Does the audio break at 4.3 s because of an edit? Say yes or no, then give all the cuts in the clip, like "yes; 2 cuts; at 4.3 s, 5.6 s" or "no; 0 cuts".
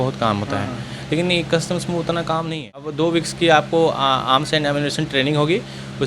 no; 1 cut; at 2.9 s